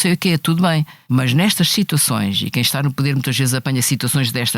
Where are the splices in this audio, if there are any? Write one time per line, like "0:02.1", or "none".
0:00.9